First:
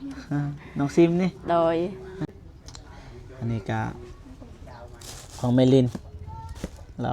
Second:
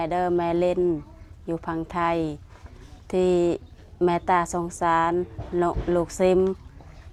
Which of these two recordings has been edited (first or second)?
first